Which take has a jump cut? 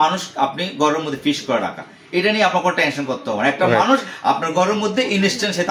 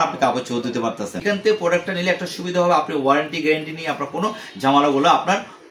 second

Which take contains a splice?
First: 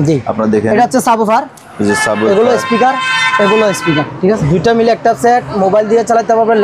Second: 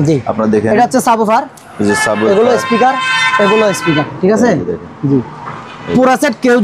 first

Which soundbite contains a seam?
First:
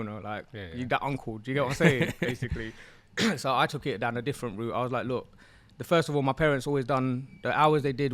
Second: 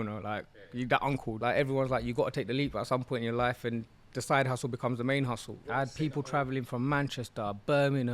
second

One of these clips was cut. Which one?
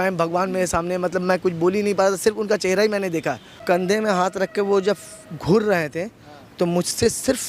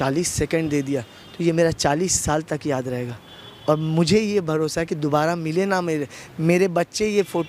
first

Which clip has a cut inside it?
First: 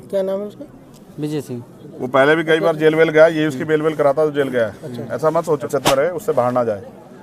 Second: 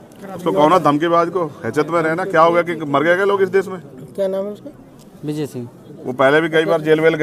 first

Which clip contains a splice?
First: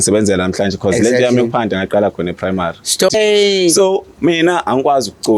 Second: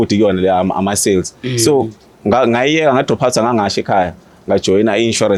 first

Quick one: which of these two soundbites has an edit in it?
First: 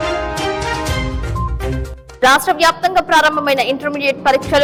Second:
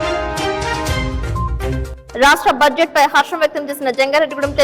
second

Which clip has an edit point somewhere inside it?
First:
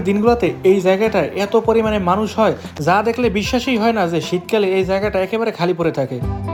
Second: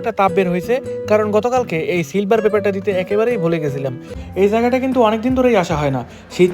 second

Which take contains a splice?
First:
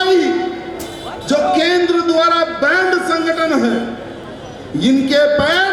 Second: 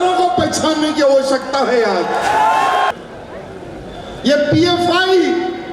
second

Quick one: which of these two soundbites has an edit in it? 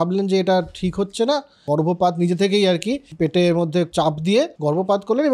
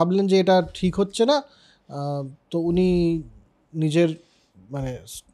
first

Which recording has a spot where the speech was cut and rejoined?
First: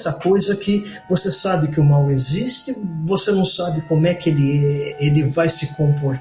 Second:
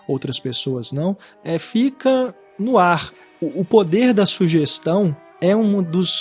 second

